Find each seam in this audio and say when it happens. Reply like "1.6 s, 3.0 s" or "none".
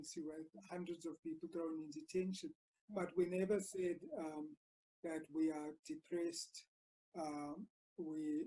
none